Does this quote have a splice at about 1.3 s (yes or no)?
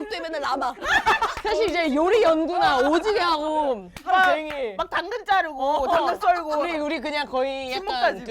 yes